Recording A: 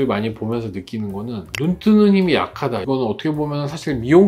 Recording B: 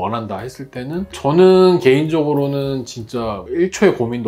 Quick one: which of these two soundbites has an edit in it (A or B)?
A